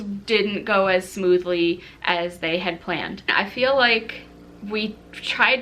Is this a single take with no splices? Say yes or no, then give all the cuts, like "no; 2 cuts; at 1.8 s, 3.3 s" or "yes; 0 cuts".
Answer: no; 1 cut; at 3.3 s